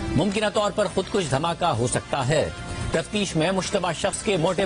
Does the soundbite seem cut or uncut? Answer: uncut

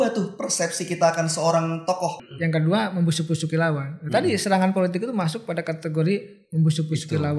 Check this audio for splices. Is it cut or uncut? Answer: cut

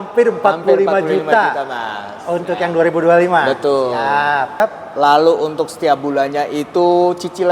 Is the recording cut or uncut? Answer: cut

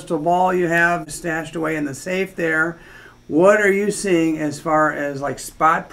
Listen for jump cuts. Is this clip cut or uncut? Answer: cut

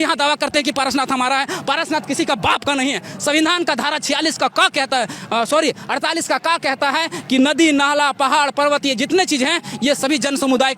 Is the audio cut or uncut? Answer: uncut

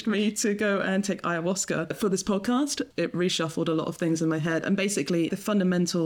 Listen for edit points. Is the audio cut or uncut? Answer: cut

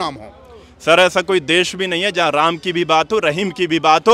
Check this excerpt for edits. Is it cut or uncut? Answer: uncut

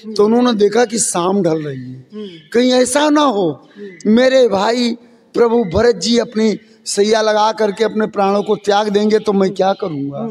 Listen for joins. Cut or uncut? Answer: uncut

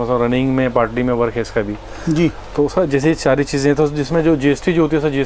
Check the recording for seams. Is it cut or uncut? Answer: uncut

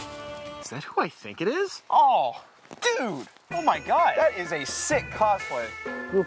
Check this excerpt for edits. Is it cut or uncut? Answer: uncut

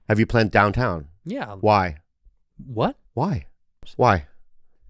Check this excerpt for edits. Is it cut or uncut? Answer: cut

